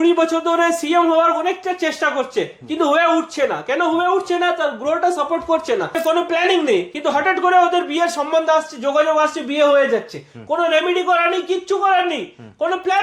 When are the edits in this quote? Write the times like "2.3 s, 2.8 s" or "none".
6.0 s